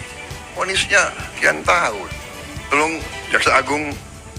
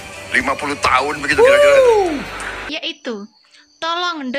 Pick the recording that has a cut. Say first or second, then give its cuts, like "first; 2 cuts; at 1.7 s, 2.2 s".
second; 1 cut; at 2.6 s